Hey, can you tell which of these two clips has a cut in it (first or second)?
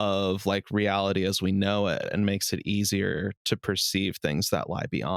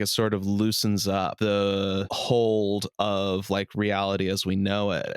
second